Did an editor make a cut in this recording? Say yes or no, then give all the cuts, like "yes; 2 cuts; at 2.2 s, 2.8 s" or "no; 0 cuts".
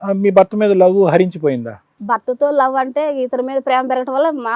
no; 0 cuts